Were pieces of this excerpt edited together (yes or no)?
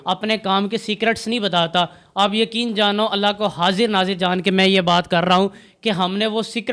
no